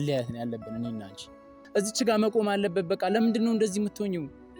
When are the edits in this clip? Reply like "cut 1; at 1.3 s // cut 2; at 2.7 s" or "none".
cut 1; at 1.6 s